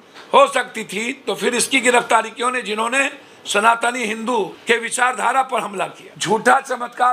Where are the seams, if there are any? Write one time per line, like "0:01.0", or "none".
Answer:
0:04.6
0:06.1